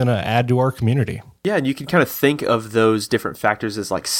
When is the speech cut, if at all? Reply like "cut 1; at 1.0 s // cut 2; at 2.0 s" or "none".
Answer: cut 1; at 1.2 s